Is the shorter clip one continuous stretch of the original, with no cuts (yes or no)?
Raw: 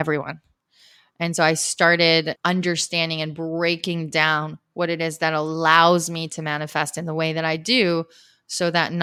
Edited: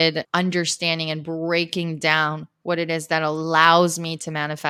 yes